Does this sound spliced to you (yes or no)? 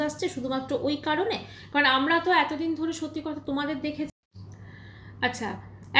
yes